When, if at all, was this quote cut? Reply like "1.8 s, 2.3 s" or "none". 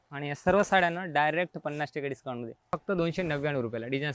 2.8 s